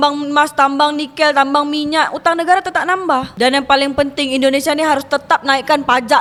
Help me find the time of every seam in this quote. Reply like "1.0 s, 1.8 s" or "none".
none